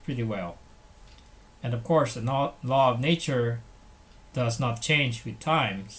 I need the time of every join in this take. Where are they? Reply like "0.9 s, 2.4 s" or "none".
none